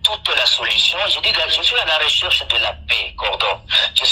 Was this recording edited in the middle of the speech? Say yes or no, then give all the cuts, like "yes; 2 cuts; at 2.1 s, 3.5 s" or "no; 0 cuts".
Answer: no; 0 cuts